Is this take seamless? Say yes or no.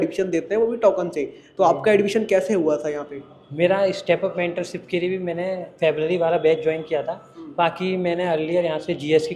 yes